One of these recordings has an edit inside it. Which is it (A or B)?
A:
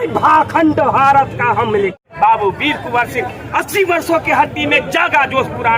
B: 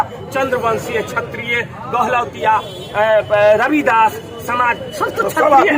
A